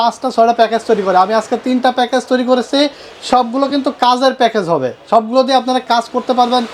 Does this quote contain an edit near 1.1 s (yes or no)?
no